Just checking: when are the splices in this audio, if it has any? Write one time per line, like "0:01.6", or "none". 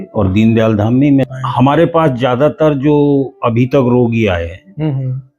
0:01.3